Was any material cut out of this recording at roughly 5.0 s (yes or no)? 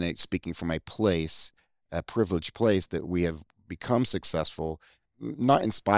yes